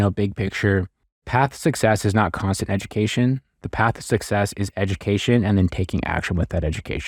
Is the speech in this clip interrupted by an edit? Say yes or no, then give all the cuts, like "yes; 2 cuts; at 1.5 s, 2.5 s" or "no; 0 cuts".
no; 0 cuts